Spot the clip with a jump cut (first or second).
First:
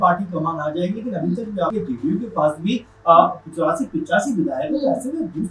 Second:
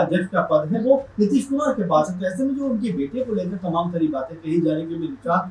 first